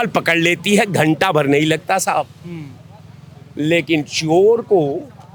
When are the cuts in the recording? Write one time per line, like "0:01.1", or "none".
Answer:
none